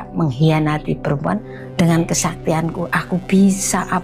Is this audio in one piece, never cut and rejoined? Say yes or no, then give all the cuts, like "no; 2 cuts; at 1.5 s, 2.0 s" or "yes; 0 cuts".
no; 1 cut; at 1.4 s